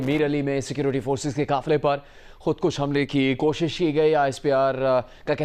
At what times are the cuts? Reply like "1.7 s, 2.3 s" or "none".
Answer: none